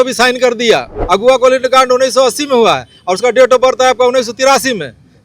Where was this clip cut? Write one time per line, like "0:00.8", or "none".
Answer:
0:00.9